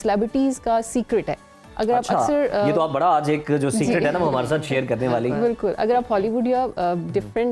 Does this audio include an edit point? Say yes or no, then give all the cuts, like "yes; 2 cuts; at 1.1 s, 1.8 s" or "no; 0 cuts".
no; 0 cuts